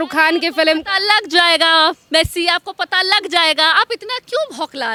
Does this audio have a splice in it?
no; 0 cuts

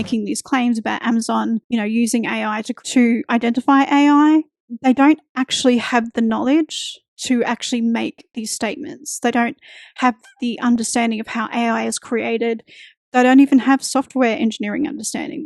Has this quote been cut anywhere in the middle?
no; 0 cuts

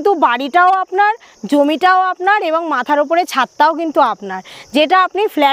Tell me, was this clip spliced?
no; 0 cuts

